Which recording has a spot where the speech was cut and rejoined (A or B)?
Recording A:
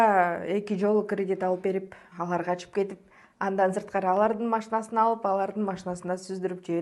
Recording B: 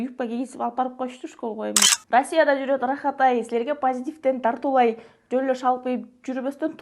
B